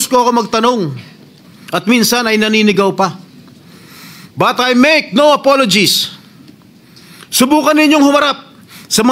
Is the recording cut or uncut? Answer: uncut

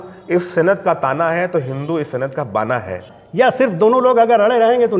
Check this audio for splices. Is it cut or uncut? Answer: cut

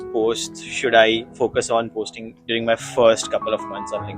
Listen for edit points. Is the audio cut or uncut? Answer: uncut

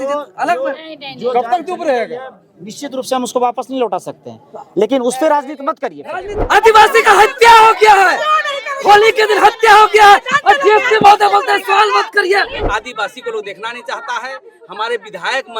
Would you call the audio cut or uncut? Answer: cut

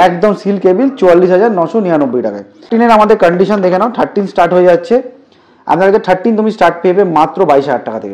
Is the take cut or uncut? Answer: cut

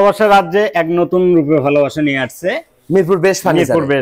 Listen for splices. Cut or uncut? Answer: uncut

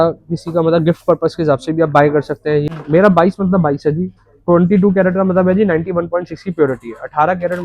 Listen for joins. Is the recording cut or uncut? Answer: cut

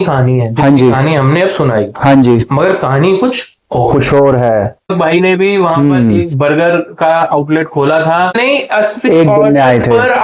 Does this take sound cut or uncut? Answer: cut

